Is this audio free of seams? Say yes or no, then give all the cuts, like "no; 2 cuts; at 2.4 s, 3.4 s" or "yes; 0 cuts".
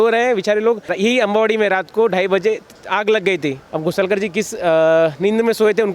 no; 2 cuts; at 0.9 s, 3.7 s